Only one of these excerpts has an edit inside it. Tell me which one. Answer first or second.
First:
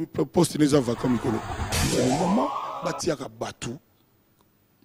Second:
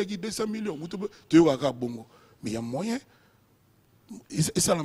first